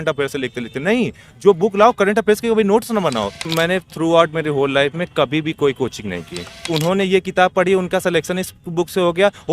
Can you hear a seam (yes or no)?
yes